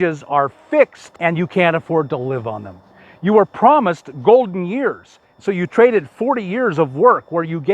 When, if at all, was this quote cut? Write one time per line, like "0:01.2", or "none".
0:01.0